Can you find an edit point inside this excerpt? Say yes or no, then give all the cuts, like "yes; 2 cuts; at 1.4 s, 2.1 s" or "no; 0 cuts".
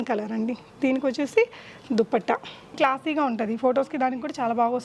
yes; 1 cut; at 2.7 s